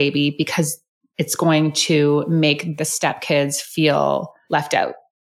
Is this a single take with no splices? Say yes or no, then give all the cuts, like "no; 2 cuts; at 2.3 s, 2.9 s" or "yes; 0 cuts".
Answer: no; 1 cut; at 2.7 s